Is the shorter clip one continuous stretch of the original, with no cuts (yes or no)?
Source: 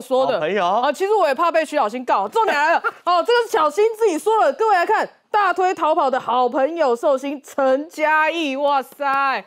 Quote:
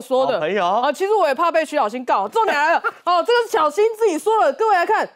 yes